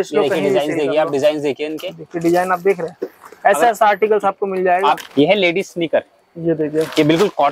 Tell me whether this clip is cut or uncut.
cut